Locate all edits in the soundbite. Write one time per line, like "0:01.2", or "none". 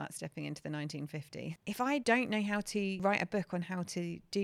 0:01.8
0:03.0